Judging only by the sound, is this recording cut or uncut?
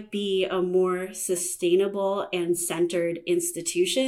uncut